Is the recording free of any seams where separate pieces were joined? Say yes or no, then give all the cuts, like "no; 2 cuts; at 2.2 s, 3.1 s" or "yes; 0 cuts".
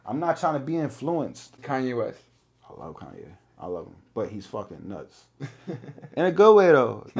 no; 1 cut; at 1.6 s